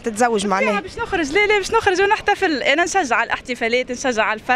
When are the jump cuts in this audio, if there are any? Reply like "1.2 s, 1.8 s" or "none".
none